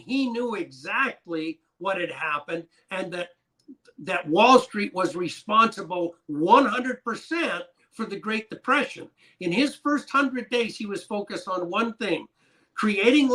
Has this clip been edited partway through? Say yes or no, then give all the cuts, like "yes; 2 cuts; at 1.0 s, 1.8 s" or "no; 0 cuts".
no; 0 cuts